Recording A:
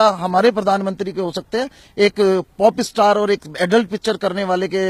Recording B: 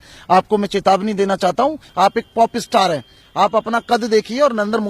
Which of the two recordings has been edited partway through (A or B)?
B